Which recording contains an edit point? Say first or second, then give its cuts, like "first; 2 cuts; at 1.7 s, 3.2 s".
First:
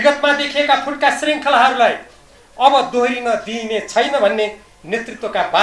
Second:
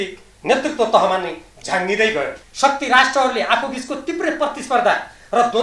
second; 1 cut; at 2.4 s